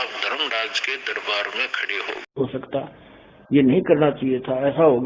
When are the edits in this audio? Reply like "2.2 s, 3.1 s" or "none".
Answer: 2.3 s